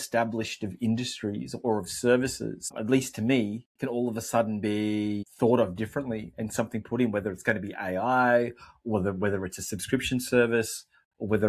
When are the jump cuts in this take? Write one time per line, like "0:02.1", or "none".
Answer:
0:02.8
0:05.2